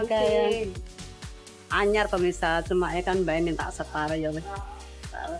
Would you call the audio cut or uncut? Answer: uncut